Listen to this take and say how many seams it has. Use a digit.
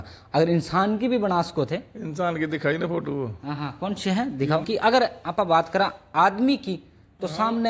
1